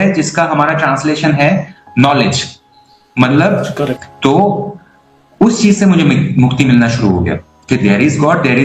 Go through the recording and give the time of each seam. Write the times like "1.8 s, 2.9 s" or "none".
4.0 s